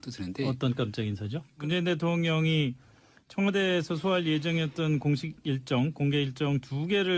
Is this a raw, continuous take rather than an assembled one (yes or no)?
no